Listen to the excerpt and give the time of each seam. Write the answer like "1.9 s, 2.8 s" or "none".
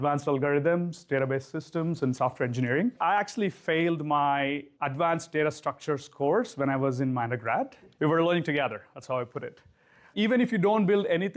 3.0 s, 4.7 s, 7.8 s, 10.1 s